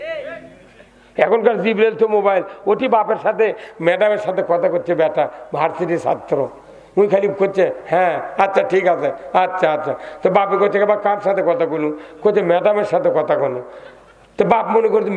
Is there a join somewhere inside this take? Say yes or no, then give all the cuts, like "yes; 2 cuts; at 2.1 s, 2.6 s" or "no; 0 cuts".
no; 0 cuts